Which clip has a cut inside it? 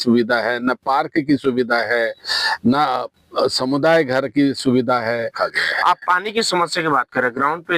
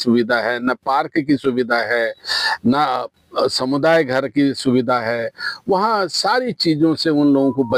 first; 1 cut; at 5.3 s

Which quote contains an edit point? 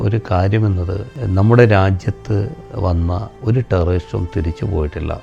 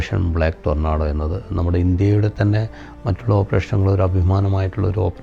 first; 2 cuts; at 1.1 s, 3.3 s

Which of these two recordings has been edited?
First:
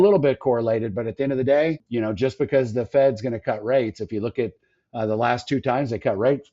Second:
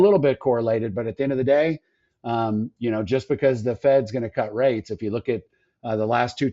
first; 1 cut; at 1.8 s

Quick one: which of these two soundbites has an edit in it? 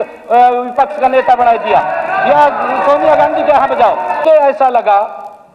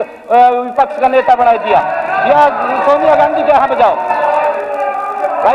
first; 1 cut; at 4.2 s

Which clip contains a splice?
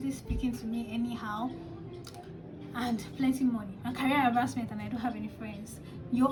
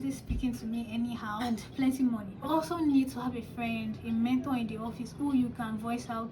second; 2 cuts; at 1.4 s, 2.5 s

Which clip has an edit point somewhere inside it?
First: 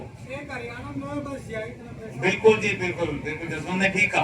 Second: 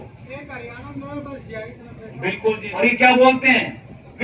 second; 1 cut; at 2.7 s

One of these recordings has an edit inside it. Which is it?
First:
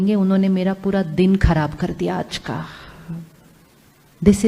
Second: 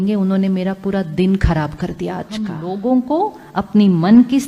second; 1 cut; at 2.4 s

